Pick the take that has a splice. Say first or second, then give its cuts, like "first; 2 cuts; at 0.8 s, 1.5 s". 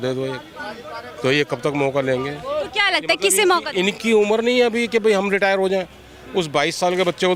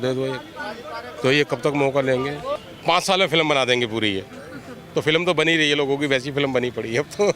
second; 1 cut; at 2.5 s